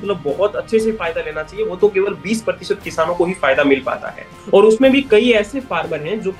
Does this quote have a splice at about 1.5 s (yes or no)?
no